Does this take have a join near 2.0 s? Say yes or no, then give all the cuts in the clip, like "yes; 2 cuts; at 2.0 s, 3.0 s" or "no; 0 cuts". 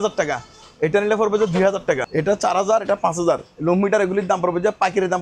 yes; 1 cut; at 2.0 s